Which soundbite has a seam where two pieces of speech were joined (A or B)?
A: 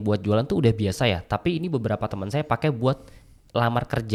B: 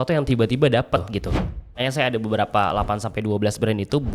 B